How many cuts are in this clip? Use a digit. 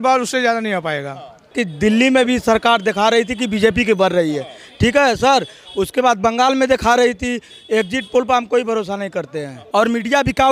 2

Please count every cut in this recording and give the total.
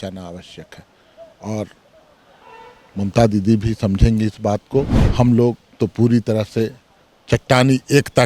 1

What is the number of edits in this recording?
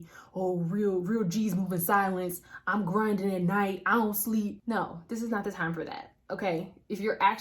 1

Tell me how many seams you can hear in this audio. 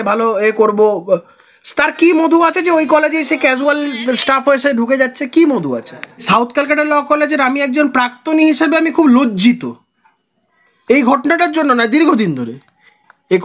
1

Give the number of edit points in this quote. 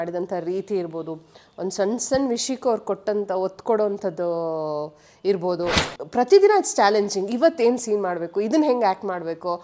1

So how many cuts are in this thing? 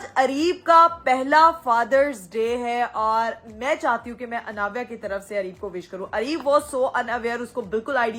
0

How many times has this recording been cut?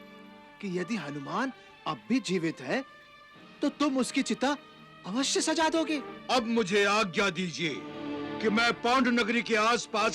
1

